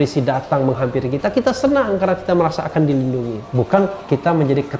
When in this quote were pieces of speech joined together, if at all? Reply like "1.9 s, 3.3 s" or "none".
3.4 s